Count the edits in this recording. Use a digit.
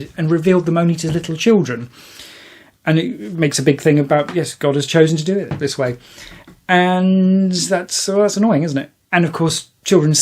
1